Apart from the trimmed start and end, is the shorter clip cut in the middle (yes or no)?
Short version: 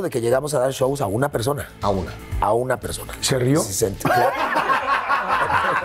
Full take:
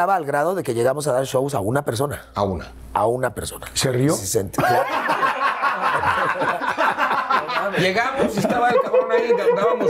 no